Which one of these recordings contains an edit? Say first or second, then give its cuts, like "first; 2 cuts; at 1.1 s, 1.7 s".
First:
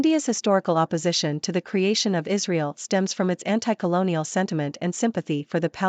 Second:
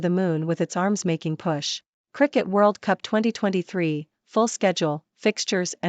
second; 1 cut; at 2.1 s